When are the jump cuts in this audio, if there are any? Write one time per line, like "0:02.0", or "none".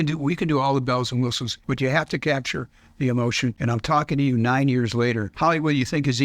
0:01.6
0:03.6
0:05.3